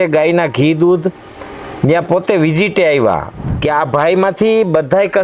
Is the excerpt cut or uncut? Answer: cut